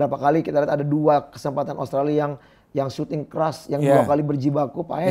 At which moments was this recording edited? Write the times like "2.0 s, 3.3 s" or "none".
none